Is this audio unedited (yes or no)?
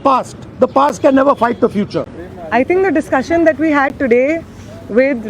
yes